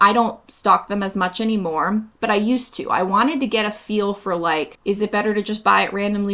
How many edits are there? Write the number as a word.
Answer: one